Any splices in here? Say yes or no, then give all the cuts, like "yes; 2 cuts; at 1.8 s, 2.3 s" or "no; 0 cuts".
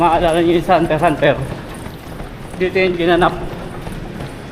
no; 0 cuts